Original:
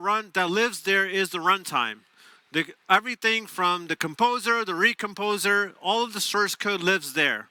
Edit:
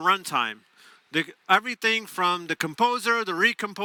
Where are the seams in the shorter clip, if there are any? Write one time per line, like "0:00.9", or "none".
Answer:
none

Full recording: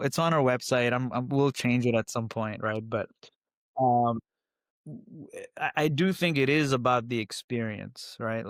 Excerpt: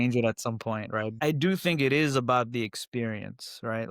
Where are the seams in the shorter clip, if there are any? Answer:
0:01.2

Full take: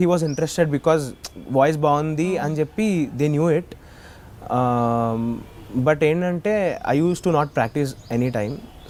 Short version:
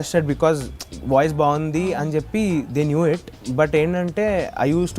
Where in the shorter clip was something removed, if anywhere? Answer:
0:03.4

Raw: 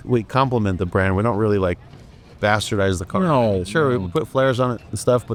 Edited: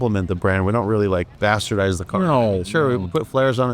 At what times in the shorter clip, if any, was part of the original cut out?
0:01.3

